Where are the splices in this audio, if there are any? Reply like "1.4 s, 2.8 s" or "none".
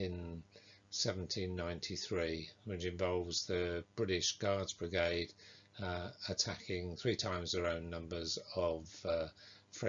8.0 s